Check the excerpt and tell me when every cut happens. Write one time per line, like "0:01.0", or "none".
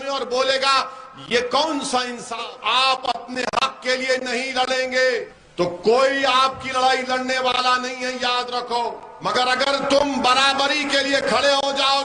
0:02.4
0:05.4
0:09.1

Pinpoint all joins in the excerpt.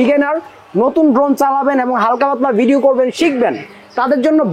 none

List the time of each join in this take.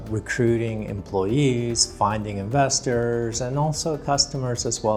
none

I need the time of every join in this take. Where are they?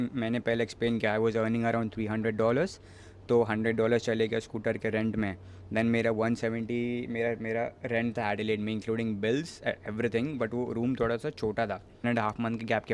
0:12.0

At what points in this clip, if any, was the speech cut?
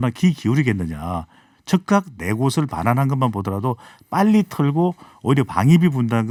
none

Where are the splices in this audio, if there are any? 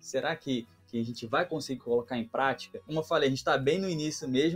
0:02.9

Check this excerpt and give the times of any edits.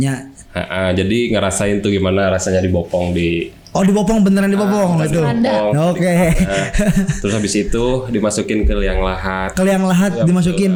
none

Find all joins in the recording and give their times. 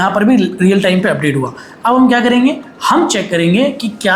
none

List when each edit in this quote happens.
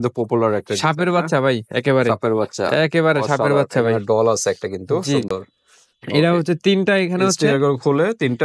none

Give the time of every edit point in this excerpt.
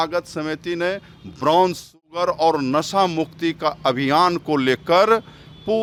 none

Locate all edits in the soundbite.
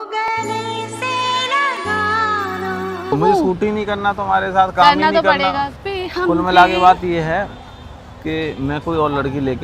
0:03.1
0:05.8

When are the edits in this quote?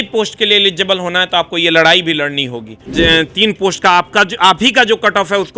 0:02.7

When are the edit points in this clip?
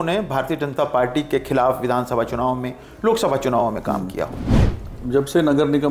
0:04.7

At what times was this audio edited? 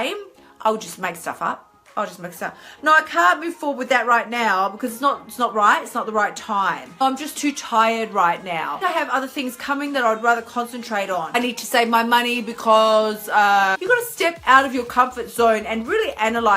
0:07.0
0:08.8
0:11.4
0:13.7

